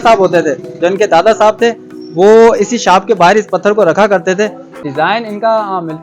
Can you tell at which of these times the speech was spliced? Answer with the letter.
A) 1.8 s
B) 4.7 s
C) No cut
B